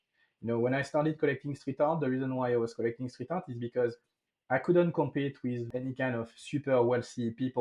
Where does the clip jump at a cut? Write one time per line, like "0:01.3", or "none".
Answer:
0:05.7